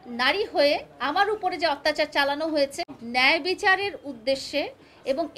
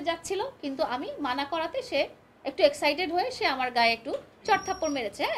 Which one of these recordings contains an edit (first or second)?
first